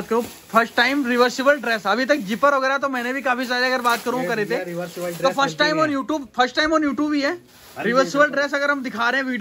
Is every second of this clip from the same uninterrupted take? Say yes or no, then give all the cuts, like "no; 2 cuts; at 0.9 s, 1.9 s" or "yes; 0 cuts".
yes; 0 cuts